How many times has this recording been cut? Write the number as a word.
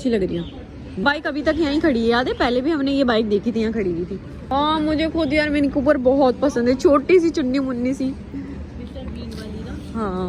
zero